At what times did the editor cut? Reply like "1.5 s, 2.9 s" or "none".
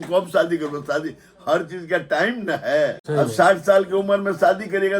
3.0 s